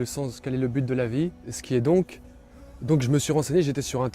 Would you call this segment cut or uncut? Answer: cut